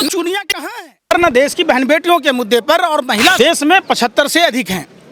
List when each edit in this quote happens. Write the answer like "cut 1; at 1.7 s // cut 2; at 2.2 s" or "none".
none